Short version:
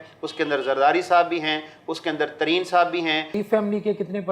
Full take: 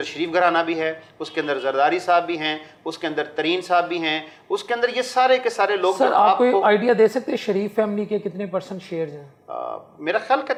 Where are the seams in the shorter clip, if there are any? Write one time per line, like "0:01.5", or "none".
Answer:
0:03.4